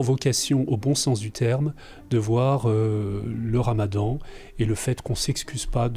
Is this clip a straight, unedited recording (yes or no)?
yes